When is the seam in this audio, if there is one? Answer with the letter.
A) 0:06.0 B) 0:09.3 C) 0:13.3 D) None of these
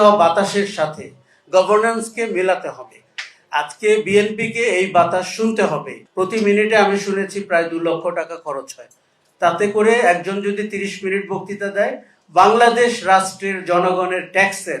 A